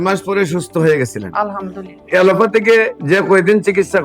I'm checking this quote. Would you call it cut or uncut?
cut